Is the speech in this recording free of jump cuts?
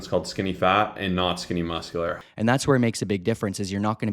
no; 1 cut; at 2.2 s

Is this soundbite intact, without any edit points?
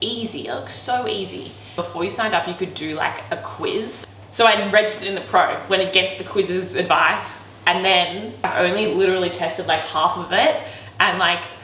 no; 3 cuts; at 1.8 s, 4.0 s, 8.4 s

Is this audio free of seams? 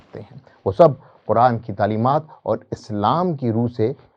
yes; 0 cuts

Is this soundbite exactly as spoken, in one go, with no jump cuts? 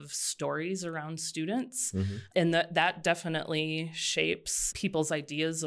no; 1 cut; at 2.2 s

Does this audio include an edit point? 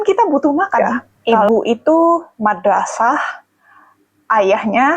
yes; 1 cut; at 1.5 s

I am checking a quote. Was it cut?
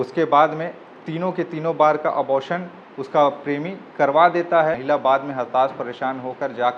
yes; 1 cut; at 4.8 s

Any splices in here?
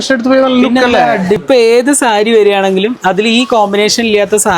yes; 1 cut; at 1.4 s

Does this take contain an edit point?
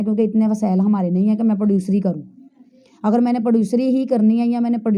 no; 0 cuts

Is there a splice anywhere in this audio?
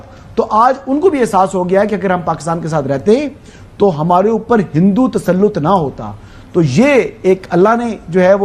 no; 0 cuts

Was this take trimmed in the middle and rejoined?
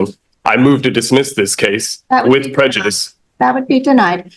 no; 0 cuts

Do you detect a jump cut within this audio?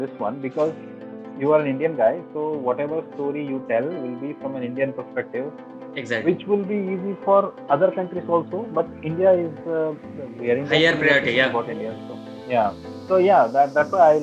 yes; 1 cut; at 12.9 s

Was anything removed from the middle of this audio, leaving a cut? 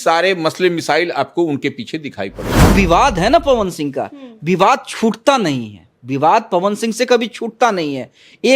yes; 1 cut; at 2.7 s

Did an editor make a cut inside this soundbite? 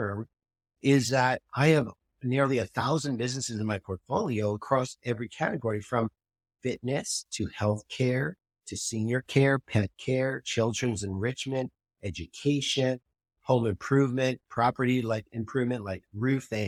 no; 0 cuts

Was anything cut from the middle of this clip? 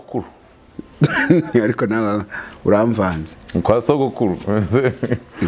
no; 0 cuts

